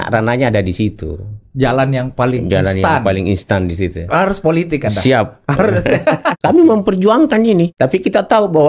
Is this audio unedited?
no; 2 cuts; at 6.4 s, 7.7 s

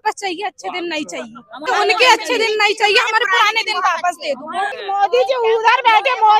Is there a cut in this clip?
yes; 2 cuts; at 1.7 s, 4.8 s

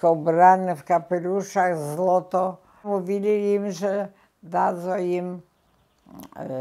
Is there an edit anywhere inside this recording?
yes; 1 cut; at 2.8 s

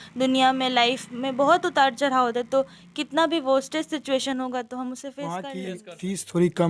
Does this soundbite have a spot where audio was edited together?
yes; 1 cut; at 5.4 s

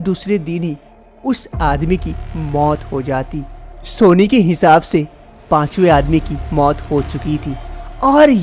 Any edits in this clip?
no; 0 cuts

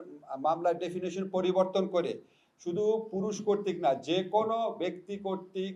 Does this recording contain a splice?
no; 0 cuts

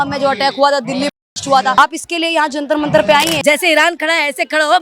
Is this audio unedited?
no; 2 cuts; at 1.8 s, 3.3 s

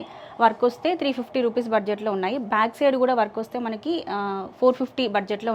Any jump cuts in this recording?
no; 0 cuts

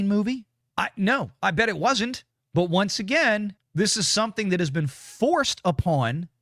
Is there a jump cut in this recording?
yes; 1 cut; at 3.6 s

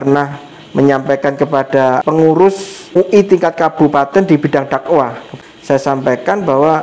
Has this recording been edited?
yes; 3 cuts; at 2.0 s, 2.9 s, 5.3 s

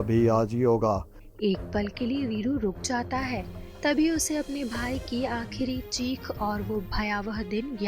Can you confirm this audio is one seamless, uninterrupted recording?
no; 1 cut; at 1.2 s

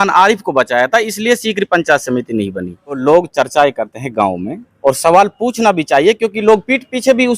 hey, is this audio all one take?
no; 1 cut; at 3.0 s

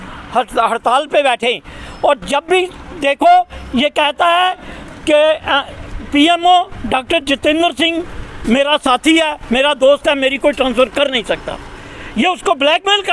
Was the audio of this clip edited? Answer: no; 0 cuts

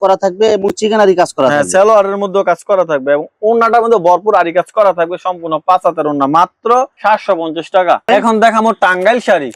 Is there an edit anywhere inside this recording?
no; 0 cuts

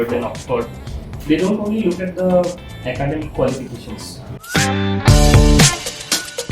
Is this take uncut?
no; 1 cut; at 4.4 s

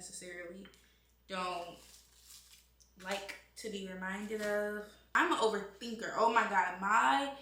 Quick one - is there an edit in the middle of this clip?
yes; 1 cut; at 5.0 s

